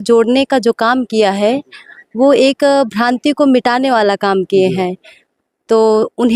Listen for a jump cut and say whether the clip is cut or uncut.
uncut